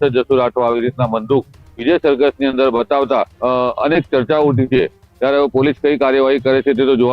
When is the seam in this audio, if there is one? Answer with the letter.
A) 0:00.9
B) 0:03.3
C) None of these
B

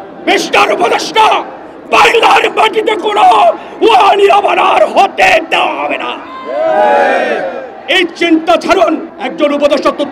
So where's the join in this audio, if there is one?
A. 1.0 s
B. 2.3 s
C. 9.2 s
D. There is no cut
C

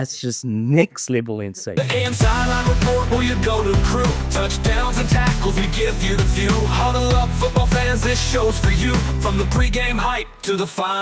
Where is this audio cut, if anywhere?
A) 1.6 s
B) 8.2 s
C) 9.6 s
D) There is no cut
A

